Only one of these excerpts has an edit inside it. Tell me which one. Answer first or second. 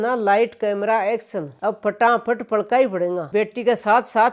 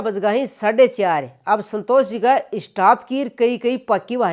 first